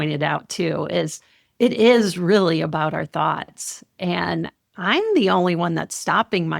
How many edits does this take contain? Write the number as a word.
one